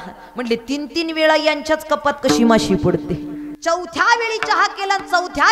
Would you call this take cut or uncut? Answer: cut